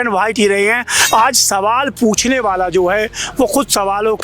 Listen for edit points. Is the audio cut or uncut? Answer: cut